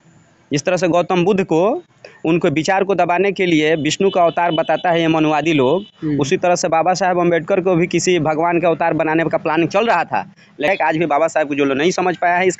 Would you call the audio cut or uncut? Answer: cut